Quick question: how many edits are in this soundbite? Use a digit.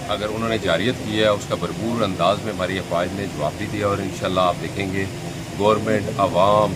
0